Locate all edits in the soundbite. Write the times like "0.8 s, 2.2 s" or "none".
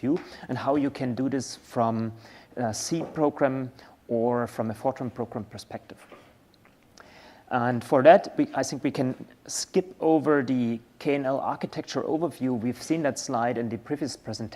4.5 s